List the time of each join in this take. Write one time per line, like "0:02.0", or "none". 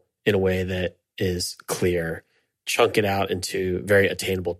none